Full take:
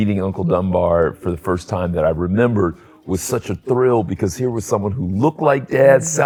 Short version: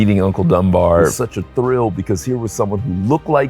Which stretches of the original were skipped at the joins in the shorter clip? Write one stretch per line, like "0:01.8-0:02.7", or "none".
0:01.2-0:03.3